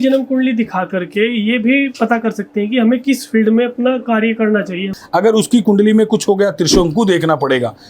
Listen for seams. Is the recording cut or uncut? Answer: cut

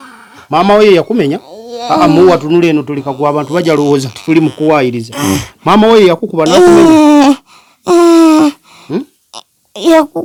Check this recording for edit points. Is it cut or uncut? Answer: uncut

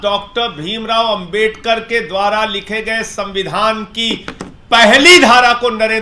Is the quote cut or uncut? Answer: uncut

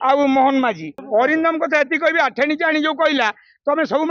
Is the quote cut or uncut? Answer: cut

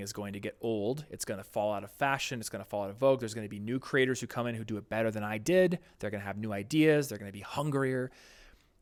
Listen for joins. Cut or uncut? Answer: uncut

